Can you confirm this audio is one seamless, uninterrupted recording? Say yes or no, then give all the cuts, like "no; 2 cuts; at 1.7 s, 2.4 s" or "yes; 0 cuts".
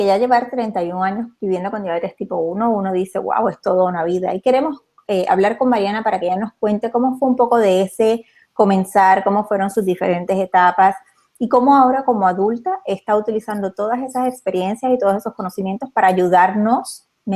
no; 1 cut; at 6.5 s